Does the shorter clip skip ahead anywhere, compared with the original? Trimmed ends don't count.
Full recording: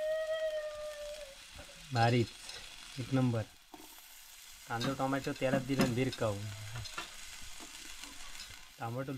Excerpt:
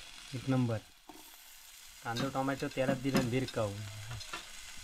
no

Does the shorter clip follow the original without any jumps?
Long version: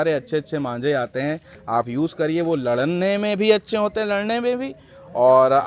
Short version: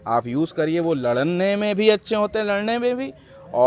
yes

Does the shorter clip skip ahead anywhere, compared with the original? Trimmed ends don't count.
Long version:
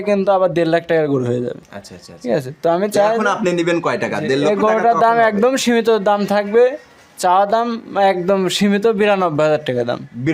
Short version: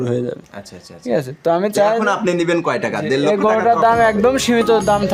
no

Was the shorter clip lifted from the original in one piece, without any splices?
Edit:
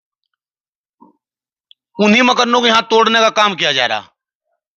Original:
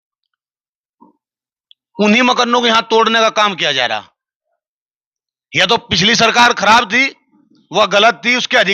yes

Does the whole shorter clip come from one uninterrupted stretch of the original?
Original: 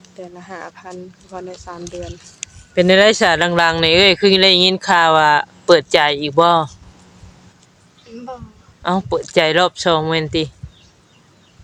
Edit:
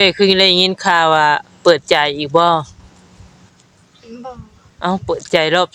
yes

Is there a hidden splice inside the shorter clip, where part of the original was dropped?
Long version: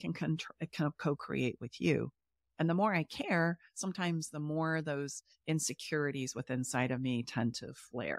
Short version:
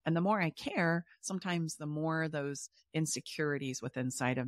no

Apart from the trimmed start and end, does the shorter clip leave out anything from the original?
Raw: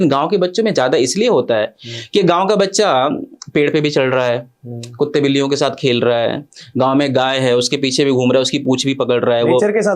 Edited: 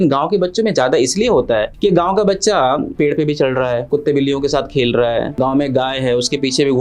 yes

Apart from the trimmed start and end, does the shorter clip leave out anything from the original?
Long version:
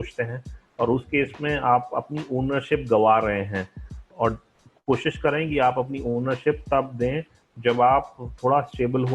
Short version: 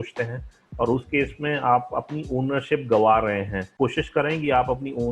yes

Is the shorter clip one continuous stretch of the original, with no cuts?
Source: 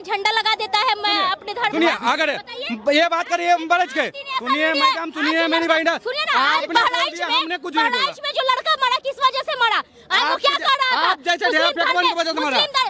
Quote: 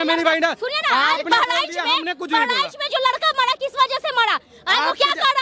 yes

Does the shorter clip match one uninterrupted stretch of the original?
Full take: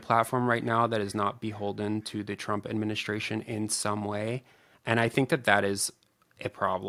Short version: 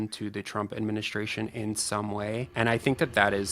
no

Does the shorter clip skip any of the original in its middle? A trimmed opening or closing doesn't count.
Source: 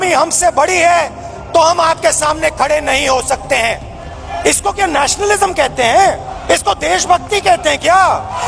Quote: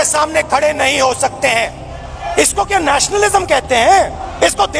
no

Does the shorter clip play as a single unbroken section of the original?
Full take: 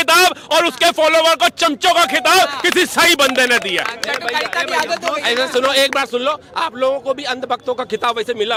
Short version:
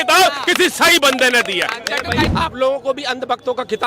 no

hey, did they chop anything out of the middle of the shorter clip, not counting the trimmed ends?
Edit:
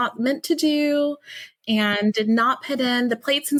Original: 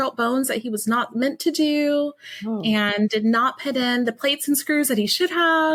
no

